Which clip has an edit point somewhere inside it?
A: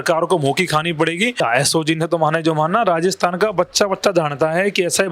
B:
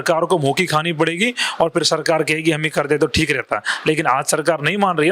A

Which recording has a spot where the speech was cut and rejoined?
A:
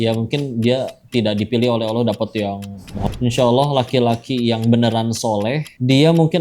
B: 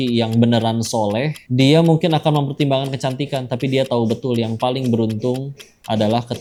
A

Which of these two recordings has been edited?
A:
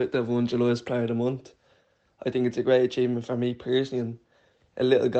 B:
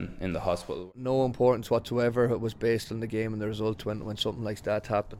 B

